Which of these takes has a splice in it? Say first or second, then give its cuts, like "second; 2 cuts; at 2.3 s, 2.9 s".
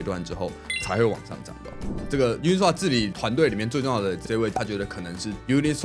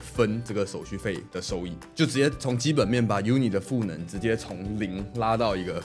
first; 3 cuts; at 2.0 s, 3.1 s, 4.5 s